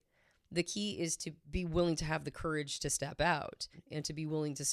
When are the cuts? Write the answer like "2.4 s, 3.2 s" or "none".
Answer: 1.3 s, 3.8 s